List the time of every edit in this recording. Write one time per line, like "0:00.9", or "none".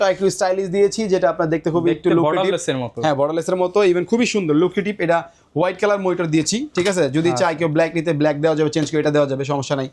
none